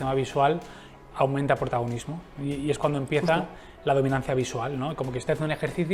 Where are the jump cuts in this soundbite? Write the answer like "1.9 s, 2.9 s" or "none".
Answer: none